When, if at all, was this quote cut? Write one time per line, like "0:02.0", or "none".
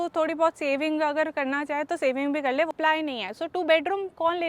0:02.7